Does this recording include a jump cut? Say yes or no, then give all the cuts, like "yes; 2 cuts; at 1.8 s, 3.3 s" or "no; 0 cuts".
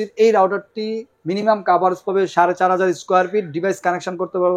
no; 0 cuts